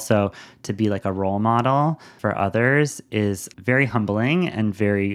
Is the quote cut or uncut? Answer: cut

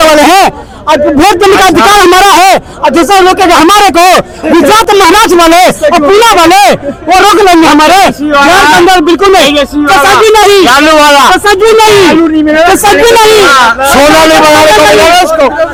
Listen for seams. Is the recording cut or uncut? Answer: uncut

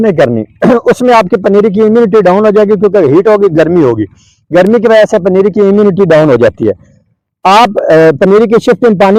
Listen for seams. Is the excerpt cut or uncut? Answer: uncut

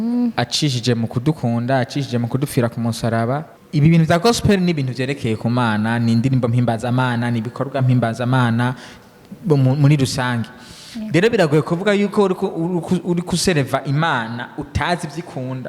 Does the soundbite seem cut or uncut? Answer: cut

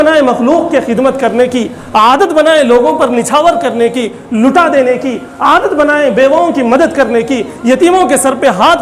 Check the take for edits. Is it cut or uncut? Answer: uncut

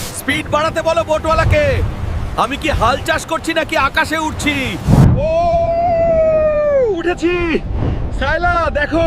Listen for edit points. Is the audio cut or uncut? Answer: uncut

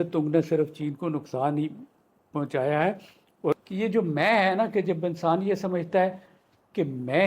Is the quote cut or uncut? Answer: cut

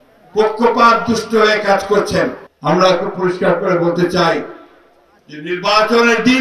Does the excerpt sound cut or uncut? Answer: cut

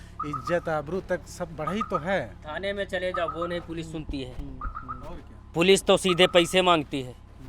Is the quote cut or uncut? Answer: uncut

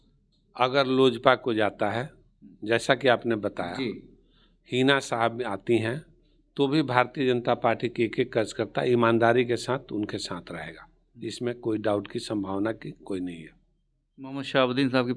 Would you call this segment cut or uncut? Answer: uncut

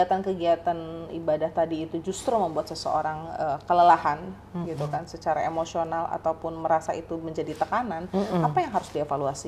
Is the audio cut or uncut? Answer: uncut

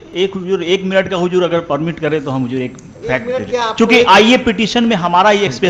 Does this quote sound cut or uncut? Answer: uncut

